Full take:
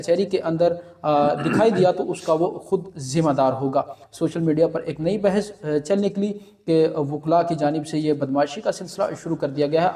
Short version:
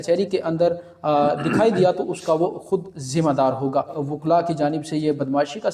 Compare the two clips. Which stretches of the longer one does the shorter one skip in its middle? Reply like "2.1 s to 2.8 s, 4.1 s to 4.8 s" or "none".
4.0 s to 7.0 s